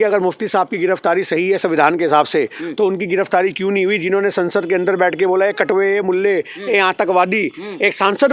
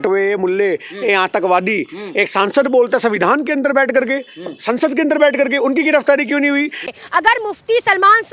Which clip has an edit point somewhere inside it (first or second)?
second